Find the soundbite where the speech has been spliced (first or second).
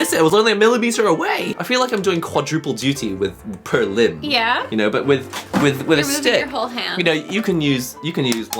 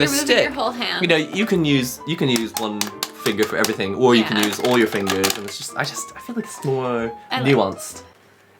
first